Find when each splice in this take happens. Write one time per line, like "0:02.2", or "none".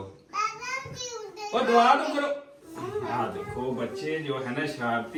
none

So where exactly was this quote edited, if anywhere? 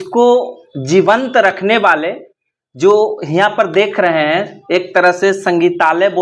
none

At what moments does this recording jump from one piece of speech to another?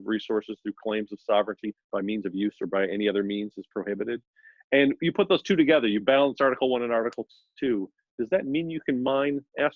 none

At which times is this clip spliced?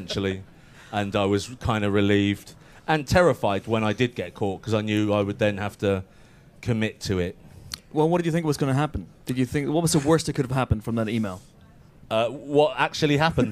0:07.2

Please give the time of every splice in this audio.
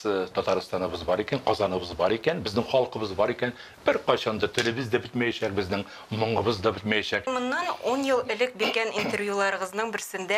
0:07.3

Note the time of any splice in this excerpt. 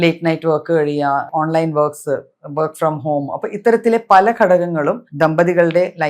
0:01.2

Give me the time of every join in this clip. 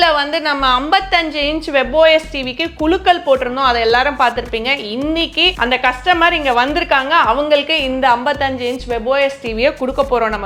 none

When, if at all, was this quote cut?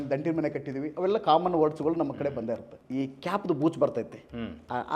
0:02.7

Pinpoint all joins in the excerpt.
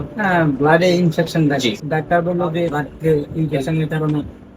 0:01.8
0:02.8

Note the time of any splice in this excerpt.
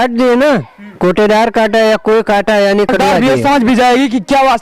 0:03.0

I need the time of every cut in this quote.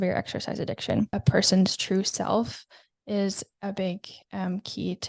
0:01.1

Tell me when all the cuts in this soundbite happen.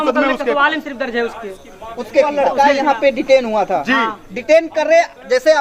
0:02.3

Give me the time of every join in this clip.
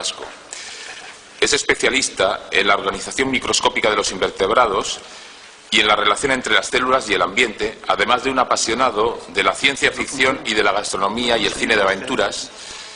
none

